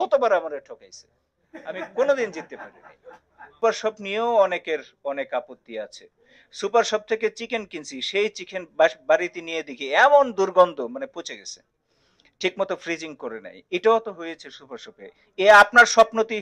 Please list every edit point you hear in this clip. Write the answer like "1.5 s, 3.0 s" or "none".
3.6 s